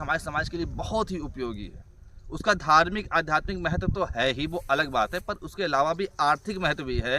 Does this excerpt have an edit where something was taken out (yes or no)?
no